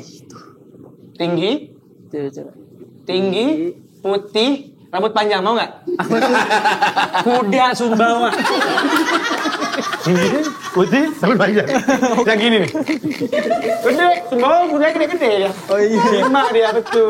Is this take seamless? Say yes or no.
yes